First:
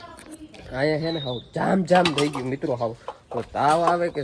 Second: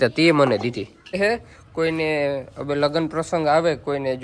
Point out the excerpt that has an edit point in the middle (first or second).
second